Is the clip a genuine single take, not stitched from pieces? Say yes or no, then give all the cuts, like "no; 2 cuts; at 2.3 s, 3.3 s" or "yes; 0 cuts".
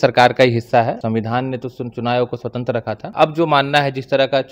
no; 2 cuts; at 1.0 s, 3.1 s